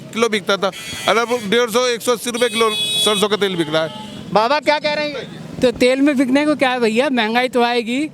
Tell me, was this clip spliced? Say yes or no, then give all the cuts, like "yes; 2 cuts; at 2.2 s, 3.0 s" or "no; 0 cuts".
no; 0 cuts